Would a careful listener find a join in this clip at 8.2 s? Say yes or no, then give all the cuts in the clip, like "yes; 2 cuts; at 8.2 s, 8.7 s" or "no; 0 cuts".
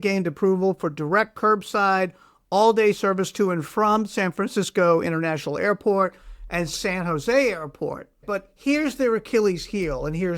yes; 1 cut; at 8.2 s